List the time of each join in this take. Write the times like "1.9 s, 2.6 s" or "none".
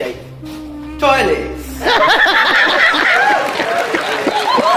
1.4 s